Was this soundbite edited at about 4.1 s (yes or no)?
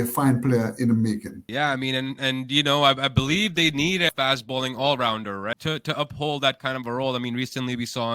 yes